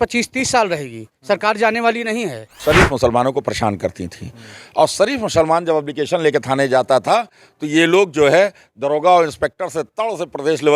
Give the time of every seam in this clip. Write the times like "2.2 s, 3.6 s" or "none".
2.6 s